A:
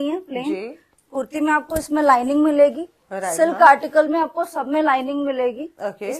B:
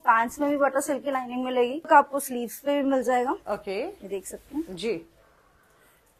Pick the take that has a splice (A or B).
B